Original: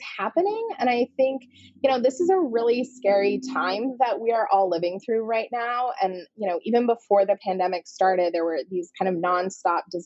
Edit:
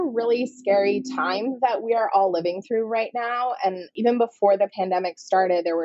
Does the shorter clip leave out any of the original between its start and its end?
yes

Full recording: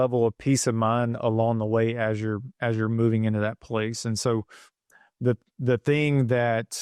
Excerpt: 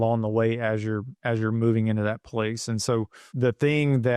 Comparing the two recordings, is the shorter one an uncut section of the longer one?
no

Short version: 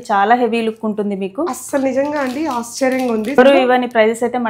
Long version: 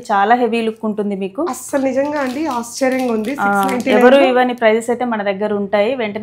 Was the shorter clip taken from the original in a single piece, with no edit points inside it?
no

